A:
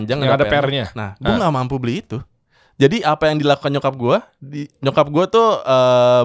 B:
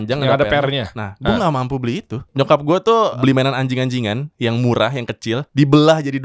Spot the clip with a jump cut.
B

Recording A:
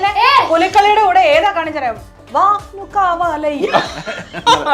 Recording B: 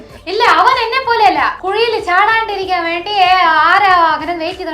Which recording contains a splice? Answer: B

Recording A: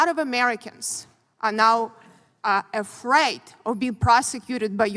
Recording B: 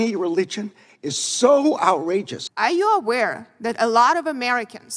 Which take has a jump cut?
B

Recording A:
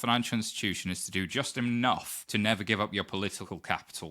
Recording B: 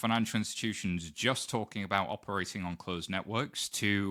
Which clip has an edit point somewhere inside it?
A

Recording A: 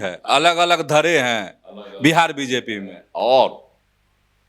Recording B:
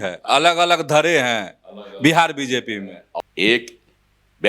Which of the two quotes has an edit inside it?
B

